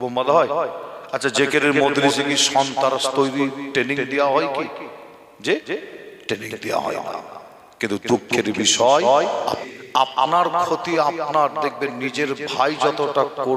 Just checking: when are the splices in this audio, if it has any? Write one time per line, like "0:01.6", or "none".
0:09.6